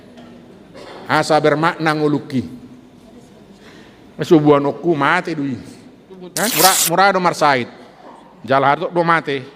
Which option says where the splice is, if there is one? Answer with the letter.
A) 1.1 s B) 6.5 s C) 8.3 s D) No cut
B